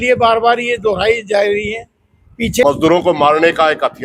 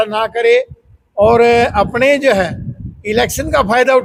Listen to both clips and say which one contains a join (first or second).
first